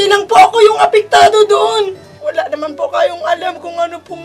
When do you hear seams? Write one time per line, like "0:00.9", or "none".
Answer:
0:02.2